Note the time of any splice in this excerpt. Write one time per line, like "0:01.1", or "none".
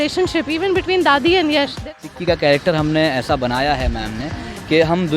0:01.9